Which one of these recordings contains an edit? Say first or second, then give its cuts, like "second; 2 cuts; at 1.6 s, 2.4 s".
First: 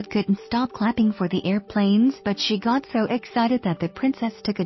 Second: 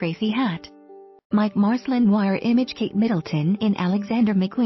second; 2 cuts; at 1.4 s, 2.5 s